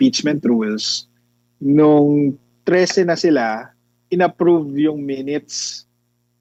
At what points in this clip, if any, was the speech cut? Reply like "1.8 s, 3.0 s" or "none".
none